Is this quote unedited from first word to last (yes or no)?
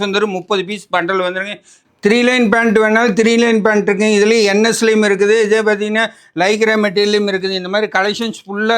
no